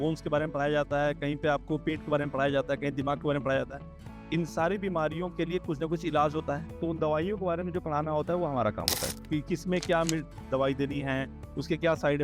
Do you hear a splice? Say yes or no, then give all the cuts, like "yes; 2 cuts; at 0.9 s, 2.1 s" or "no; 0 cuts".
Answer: yes; 1 cut; at 6.7 s